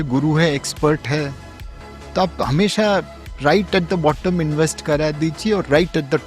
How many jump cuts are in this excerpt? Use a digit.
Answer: 0